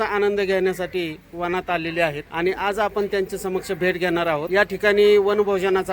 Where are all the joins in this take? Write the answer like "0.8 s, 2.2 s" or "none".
2.2 s, 4.5 s